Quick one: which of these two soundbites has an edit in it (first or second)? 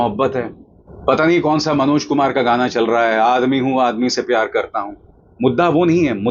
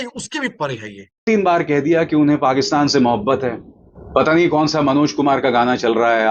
second